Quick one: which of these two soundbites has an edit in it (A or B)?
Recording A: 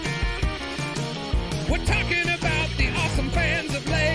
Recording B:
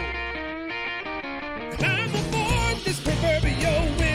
A